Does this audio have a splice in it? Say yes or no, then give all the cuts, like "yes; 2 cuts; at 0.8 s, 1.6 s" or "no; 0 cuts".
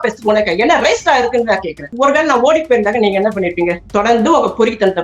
yes; 2 cuts; at 1.9 s, 3.8 s